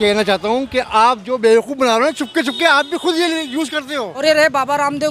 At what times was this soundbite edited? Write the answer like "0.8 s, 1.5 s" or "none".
4.2 s